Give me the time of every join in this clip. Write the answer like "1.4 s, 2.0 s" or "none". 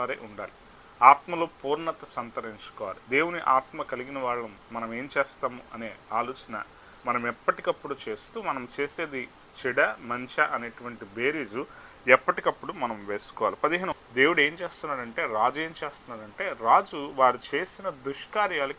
13.9 s